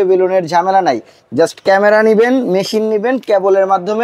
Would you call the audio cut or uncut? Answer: uncut